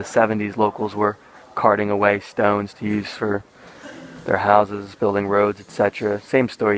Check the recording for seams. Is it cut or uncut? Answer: cut